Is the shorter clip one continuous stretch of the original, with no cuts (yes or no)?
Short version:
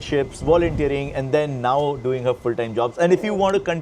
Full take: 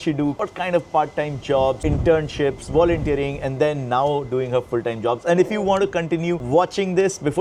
yes